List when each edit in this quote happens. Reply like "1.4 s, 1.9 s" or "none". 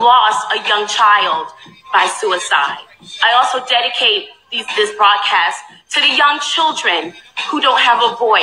6.8 s